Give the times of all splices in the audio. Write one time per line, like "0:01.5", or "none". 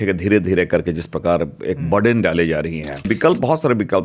0:03.1